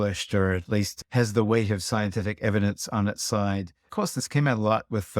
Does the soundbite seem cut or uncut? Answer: cut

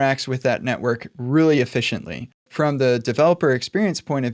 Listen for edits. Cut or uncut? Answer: cut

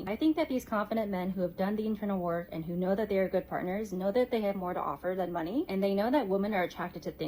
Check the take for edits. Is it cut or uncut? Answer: cut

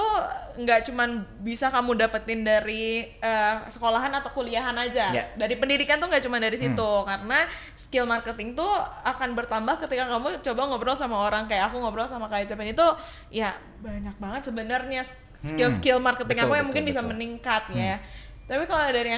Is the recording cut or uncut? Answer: uncut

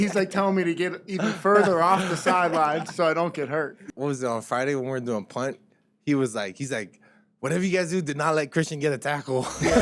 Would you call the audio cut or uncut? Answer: cut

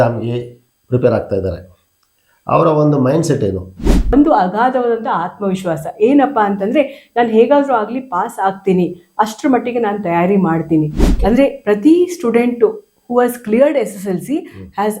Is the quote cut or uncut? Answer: cut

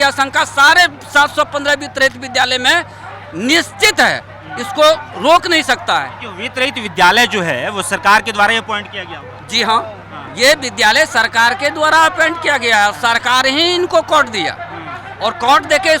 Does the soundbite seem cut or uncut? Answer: uncut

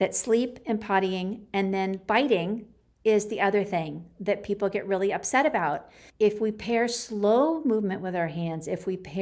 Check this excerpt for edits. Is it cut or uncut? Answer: uncut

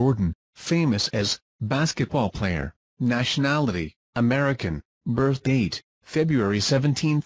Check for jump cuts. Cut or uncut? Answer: uncut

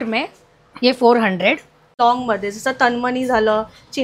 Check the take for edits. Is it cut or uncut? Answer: cut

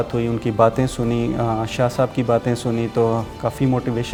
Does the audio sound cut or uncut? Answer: uncut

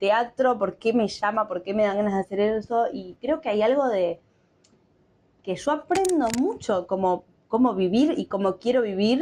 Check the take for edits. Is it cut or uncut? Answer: uncut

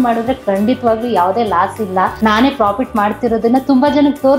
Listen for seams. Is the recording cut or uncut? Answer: cut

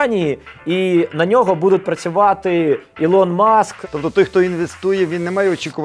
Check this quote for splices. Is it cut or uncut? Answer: cut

